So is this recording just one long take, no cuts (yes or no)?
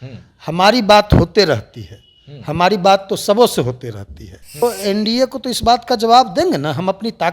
no